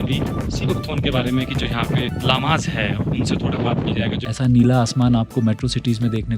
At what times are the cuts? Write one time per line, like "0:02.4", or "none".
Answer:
0:02.1
0:04.3